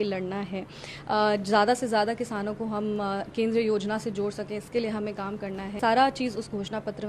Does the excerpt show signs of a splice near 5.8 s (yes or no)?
yes